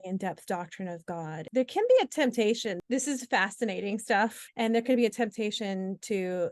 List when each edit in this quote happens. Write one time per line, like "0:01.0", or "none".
0:01.4
0:02.8
0:04.4